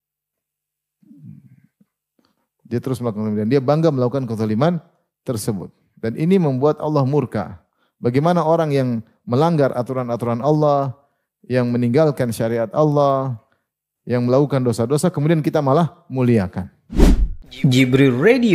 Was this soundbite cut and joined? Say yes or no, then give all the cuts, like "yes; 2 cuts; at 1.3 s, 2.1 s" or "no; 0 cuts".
yes; 1 cut; at 16.9 s